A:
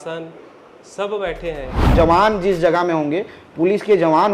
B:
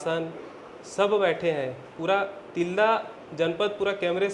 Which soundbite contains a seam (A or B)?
A